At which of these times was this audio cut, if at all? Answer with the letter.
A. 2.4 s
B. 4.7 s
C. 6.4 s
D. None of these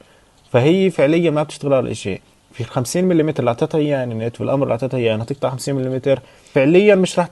C